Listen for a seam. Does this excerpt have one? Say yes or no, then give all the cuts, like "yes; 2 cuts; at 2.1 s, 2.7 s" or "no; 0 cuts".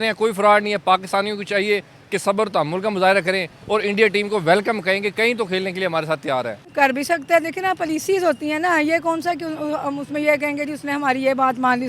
yes; 1 cut; at 6.6 s